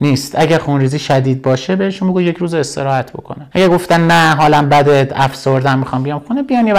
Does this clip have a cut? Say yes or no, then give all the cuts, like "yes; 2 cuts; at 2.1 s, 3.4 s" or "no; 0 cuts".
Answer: no; 0 cuts